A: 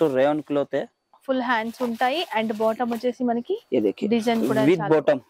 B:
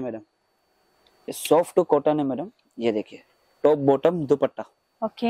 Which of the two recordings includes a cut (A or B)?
B